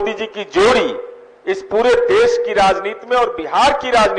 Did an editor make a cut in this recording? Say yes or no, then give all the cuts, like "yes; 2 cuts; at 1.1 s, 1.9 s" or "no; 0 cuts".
no; 0 cuts